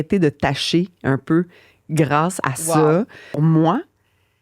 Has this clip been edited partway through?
yes; 1 cut; at 3.4 s

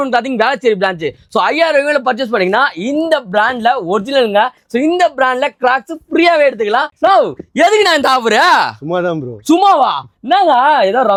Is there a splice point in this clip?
no; 0 cuts

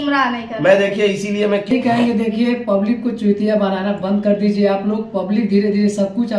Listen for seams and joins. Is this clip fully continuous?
no; 1 cut; at 1.7 s

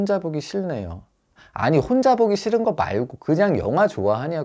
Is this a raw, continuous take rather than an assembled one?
yes; 0 cuts

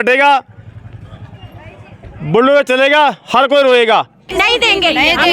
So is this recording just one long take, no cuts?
no; 1 cut; at 4.3 s

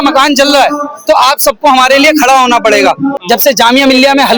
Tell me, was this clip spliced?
yes; 1 cut; at 3.1 s

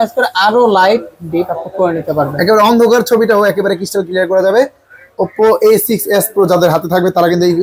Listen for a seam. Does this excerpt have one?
no; 0 cuts

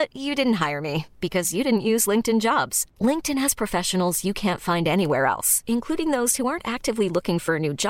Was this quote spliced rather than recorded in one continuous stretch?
no; 0 cuts

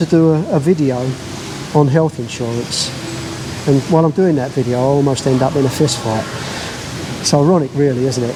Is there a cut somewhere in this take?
no; 0 cuts

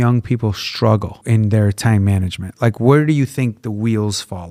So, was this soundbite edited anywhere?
no; 0 cuts

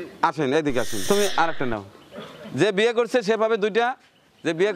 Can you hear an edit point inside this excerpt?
yes; 1 cut; at 0.9 s

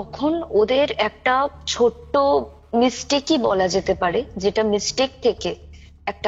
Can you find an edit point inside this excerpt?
yes; 1 cut; at 1.6 s

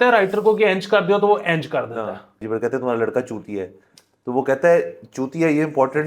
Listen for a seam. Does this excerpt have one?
yes; 1 cut; at 2.4 s

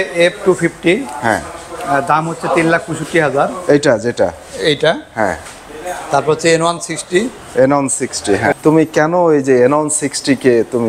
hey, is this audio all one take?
no; 1 cut; at 8.5 s

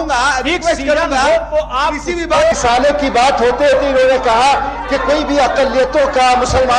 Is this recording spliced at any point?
yes; 1 cut; at 2.5 s

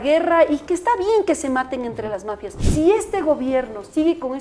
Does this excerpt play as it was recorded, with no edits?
no; 1 cut; at 2.6 s

